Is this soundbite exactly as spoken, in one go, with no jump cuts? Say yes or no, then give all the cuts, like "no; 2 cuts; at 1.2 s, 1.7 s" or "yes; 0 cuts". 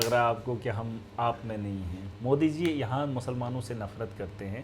no; 1 cut; at 2.0 s